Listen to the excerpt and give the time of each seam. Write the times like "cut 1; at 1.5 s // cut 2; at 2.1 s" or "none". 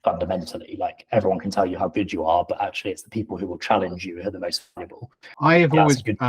cut 1; at 5.2 s